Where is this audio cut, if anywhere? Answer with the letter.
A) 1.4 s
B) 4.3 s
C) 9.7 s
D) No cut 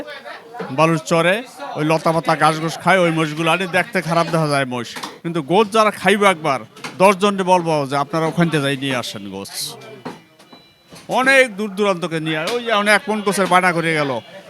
D